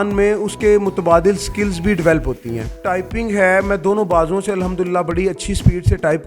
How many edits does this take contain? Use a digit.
1